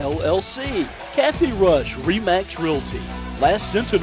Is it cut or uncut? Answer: cut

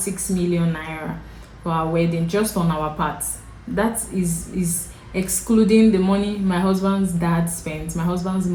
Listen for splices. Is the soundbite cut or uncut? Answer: uncut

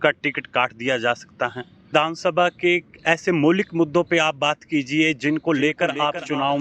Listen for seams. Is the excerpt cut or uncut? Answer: cut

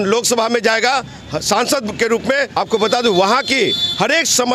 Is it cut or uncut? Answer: cut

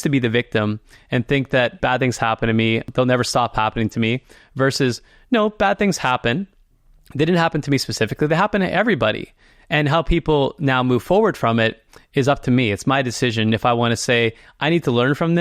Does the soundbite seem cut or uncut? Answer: cut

